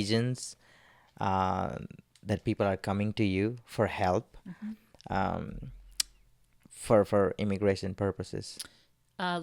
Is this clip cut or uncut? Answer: uncut